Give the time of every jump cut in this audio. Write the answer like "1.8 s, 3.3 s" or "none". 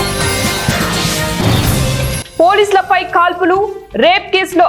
2.2 s